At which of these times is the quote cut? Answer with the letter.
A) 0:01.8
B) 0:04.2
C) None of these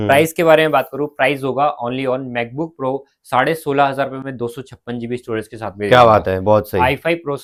C